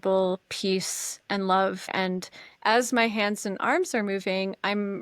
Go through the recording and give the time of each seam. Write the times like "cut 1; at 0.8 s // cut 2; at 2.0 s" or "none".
cut 1; at 1.9 s